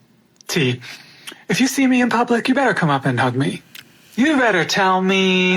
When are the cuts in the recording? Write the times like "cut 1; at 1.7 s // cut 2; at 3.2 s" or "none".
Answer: cut 1; at 4.5 s